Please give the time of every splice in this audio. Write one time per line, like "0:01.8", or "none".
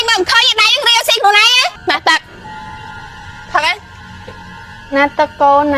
0:01.8